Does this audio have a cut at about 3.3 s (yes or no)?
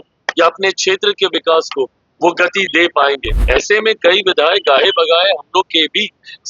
yes